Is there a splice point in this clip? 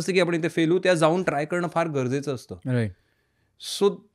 no; 0 cuts

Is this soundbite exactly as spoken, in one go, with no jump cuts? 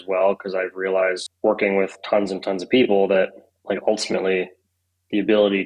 no; 2 cuts; at 1.3 s, 3.5 s

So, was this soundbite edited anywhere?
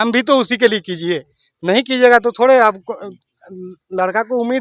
no; 0 cuts

